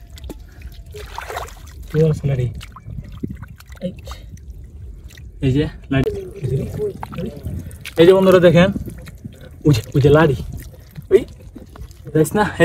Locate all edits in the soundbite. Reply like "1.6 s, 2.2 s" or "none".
6.0 s